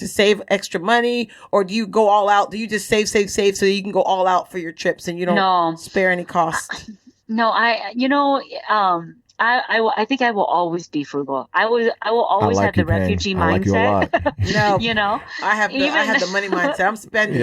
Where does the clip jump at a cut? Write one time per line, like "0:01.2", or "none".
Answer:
none